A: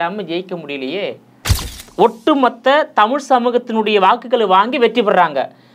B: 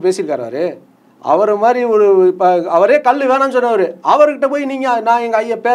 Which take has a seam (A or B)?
A